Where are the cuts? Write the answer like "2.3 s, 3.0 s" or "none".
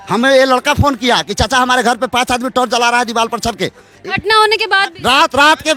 none